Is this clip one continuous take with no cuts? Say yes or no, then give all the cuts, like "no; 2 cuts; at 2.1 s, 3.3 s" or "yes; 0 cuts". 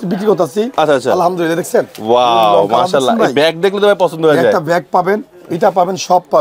yes; 0 cuts